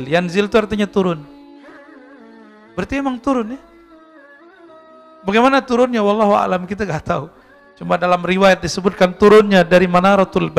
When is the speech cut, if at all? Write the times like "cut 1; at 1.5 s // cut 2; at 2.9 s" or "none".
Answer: cut 1; at 3.6 s // cut 2; at 5.2 s